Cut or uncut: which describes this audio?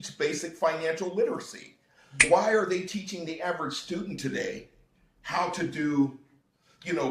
cut